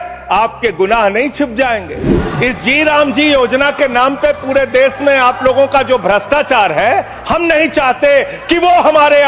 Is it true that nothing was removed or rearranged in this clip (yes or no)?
no